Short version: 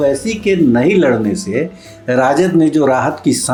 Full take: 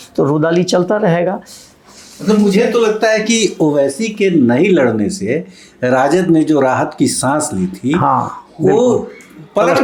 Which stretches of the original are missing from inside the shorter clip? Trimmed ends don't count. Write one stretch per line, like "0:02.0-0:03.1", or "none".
none